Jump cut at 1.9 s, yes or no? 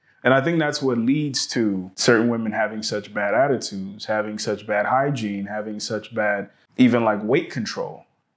yes